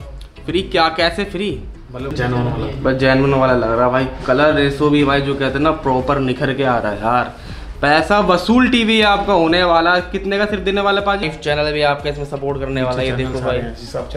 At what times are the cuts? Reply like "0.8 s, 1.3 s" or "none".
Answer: 2.1 s, 11.2 s